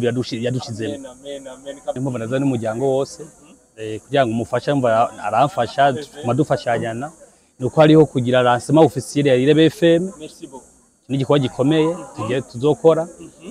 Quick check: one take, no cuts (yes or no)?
no